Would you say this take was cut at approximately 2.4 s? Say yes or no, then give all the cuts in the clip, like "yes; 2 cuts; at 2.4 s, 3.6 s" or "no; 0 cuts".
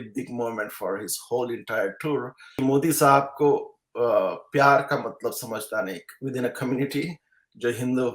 yes; 1 cut; at 2.4 s